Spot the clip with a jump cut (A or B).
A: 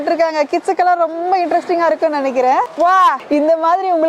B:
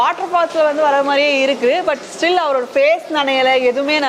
A